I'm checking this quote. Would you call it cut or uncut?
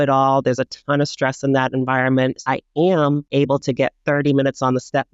cut